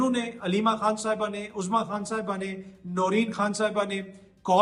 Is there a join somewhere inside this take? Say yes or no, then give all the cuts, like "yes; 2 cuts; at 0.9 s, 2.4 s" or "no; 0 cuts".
no; 0 cuts